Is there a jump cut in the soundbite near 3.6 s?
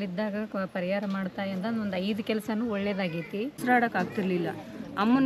yes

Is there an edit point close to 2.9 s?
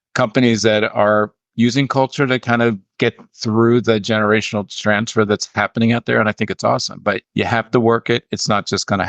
yes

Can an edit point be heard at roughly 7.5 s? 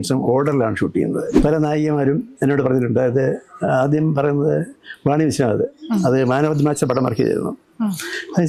no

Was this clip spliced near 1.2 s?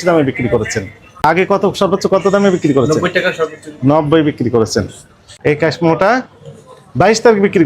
yes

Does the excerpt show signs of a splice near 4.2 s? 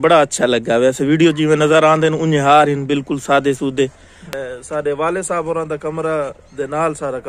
yes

